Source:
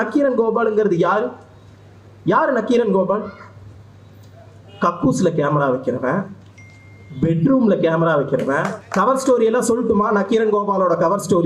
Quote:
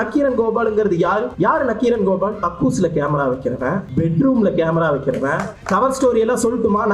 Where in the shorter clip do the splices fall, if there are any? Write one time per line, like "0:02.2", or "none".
0:01.3
0:02.4
0:03.9